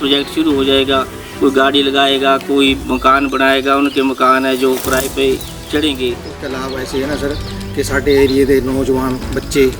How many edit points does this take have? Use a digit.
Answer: 1